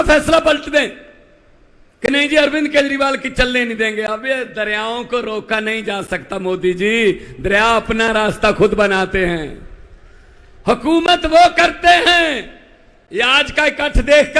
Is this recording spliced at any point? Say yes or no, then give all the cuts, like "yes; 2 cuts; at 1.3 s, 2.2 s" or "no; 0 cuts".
no; 0 cuts